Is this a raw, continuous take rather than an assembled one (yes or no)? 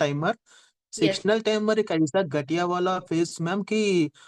yes